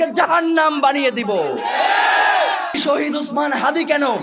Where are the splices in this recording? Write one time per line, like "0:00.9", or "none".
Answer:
0:02.8